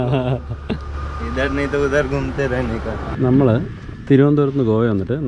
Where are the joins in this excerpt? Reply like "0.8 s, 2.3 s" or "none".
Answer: 3.0 s

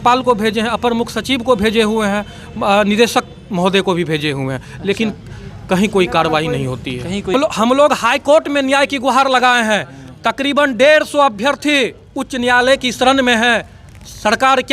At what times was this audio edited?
7.3 s

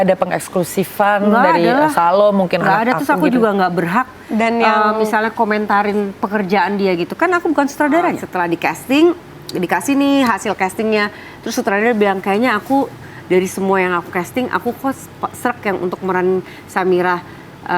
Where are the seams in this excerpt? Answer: 8.3 s

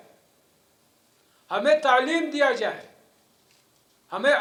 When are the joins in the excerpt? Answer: none

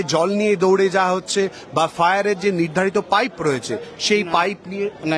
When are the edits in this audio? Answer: none

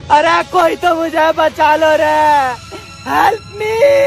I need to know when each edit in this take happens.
none

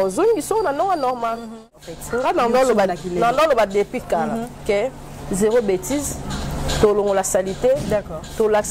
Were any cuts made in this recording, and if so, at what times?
1.7 s

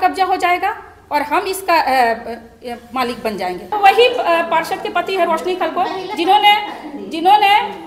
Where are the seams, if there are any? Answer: 3.7 s

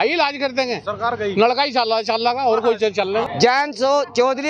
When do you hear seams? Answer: 3.3 s

